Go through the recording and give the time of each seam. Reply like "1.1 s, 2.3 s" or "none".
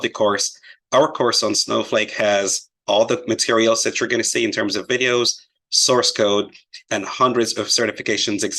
3.7 s